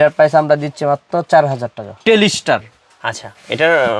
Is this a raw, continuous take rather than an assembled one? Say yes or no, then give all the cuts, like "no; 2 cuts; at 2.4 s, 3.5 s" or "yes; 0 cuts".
no; 1 cut; at 2.0 s